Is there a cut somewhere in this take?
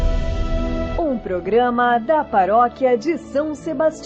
yes; 1 cut; at 0.9 s

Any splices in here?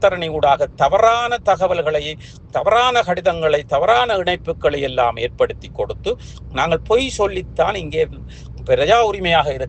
no; 0 cuts

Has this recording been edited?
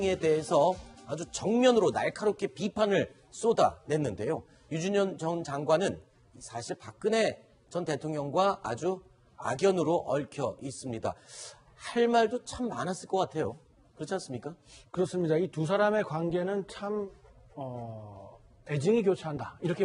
no; 0 cuts

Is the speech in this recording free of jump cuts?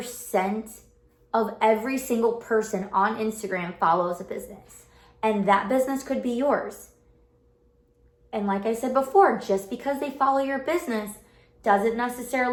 yes; 0 cuts

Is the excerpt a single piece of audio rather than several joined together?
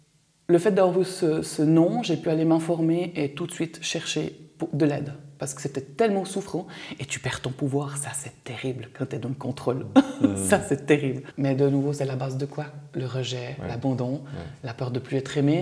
no; 1 cut; at 11.2 s

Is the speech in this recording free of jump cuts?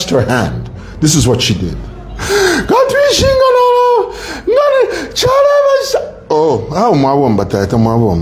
yes; 0 cuts

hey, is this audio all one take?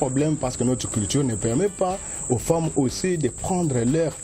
yes; 0 cuts

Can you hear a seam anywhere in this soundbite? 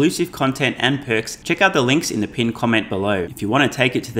yes; 2 cuts; at 1.3 s, 3.3 s

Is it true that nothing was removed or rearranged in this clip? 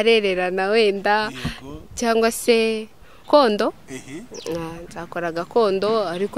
no; 1 cut; at 3.1 s

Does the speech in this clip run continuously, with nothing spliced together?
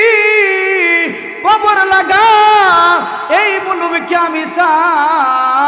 yes; 0 cuts

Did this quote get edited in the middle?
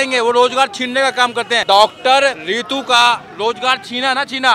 yes; 2 cuts; at 1.6 s, 2.4 s

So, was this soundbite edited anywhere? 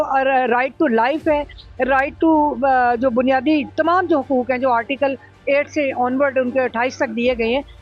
no; 0 cuts

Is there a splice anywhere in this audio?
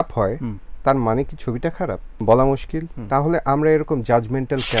yes; 1 cut; at 2.1 s

